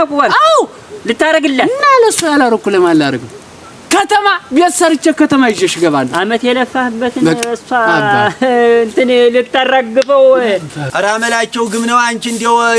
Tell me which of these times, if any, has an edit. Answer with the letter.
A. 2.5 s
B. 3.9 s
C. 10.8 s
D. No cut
C